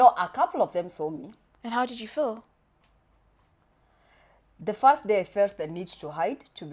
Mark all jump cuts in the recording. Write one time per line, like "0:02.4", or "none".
none